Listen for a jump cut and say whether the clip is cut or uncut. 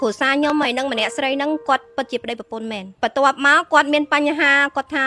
cut